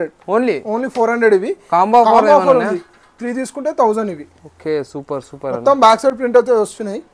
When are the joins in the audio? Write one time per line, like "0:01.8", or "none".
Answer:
none

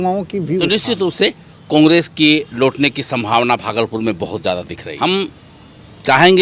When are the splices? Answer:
0:00.8
0:04.8

